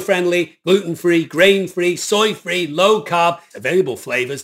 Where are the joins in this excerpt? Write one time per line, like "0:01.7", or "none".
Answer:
0:03.5